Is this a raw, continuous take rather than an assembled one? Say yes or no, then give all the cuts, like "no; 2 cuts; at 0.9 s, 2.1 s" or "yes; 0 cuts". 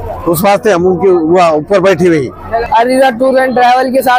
no; 1 cut; at 2.6 s